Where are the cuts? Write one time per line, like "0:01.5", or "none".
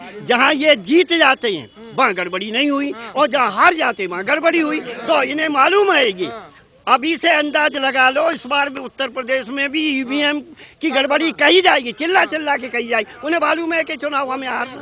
none

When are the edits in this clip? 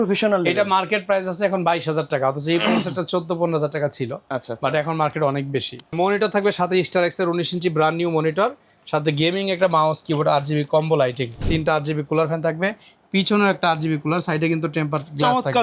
0:05.9
0:11.5

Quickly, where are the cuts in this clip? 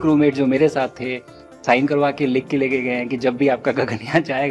0:01.6

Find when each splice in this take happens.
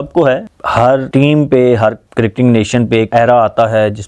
0:00.8
0:02.0
0:03.1

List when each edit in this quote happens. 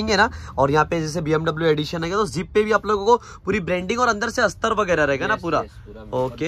none

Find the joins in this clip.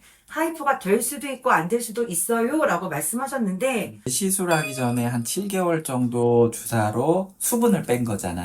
0:04.1

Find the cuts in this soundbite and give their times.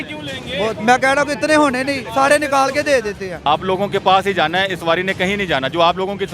0:03.3

